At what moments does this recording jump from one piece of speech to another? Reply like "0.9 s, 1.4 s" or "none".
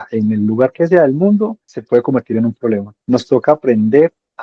1.7 s, 2.9 s